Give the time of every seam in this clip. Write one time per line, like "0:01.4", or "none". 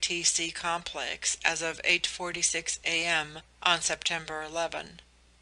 0:04.0